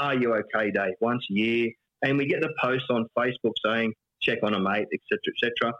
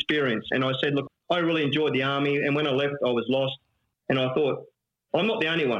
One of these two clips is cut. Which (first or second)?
second